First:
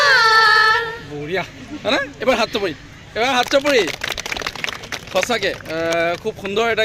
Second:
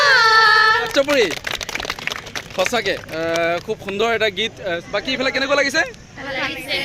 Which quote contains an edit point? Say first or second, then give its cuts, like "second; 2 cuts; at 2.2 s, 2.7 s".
second; 2 cuts; at 0.9 s, 4.8 s